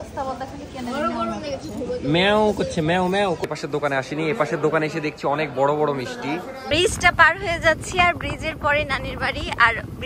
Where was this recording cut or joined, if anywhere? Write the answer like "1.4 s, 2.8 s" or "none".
3.4 s, 6.5 s